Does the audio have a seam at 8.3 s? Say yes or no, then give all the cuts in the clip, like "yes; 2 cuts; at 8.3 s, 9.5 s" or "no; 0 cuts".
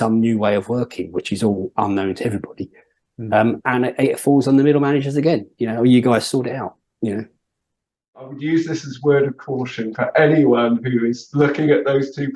yes; 1 cut; at 8.3 s